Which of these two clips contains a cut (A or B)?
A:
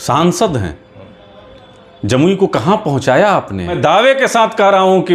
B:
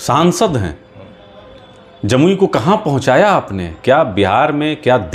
A